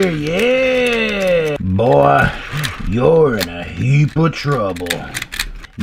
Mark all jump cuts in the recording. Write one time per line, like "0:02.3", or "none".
0:01.6